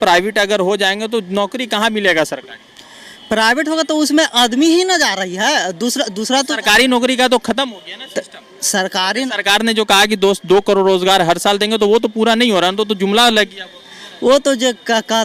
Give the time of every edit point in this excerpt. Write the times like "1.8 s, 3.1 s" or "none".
none